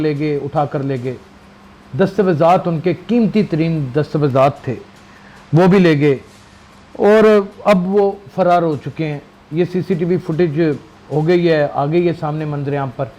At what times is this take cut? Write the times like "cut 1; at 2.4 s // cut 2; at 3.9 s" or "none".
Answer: none